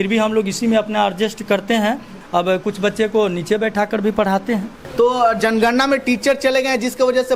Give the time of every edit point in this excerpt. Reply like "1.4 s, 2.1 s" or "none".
2.2 s, 4.8 s